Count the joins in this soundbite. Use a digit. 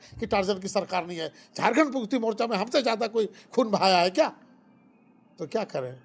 0